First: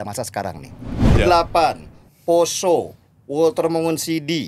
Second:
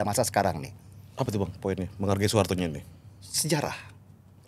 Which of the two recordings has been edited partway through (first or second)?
first